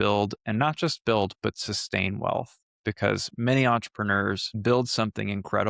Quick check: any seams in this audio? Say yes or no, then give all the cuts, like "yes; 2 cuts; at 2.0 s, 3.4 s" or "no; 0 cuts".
yes; 1 cut; at 4.5 s